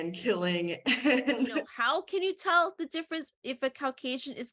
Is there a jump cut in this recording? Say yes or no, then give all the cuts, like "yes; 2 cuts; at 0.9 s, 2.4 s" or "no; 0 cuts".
yes; 1 cut; at 1.7 s